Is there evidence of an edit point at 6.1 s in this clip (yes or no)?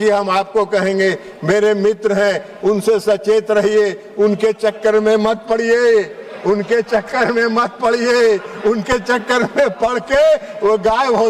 no